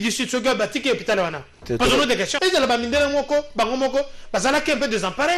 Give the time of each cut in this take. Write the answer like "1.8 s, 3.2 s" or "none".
2.4 s

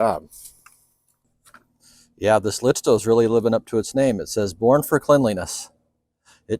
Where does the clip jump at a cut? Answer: 1.3 s

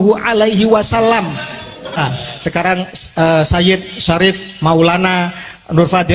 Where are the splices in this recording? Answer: 2.0 s

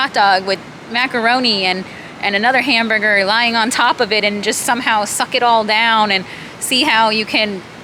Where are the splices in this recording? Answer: none

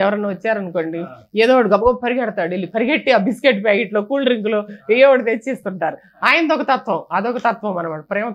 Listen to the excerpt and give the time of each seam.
none

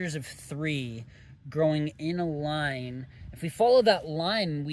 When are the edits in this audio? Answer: none

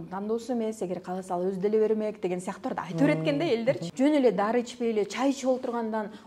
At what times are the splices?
3.9 s

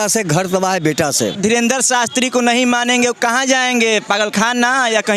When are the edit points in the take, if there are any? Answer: 1.4 s

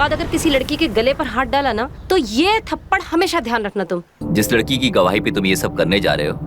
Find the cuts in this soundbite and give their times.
4.2 s

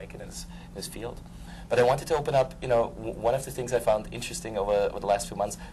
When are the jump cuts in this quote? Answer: none

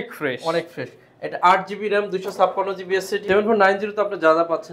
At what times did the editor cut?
3.2 s

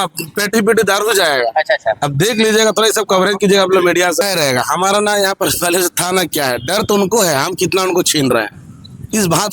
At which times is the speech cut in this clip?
4.2 s

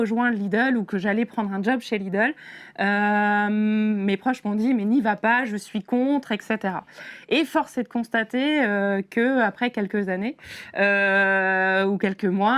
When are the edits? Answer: none

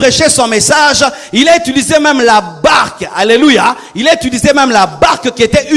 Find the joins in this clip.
none

